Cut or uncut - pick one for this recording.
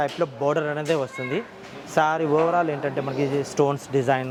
uncut